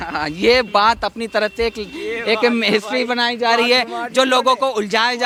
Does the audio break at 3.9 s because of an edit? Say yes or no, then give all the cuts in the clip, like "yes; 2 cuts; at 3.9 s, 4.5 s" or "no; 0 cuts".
no; 0 cuts